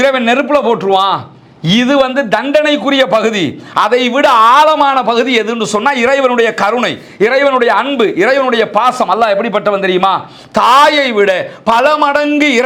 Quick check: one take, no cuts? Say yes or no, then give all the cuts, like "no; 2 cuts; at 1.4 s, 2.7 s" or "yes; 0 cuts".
yes; 0 cuts